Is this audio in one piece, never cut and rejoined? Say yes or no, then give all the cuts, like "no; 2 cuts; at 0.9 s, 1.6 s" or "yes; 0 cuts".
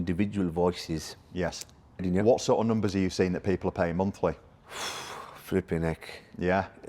no; 1 cut; at 2.0 s